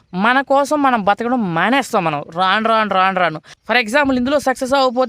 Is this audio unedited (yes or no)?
no